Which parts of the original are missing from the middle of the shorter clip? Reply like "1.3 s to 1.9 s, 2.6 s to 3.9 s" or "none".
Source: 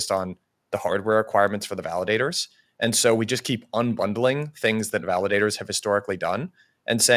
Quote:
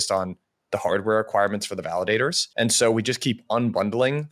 2.4 s to 2.7 s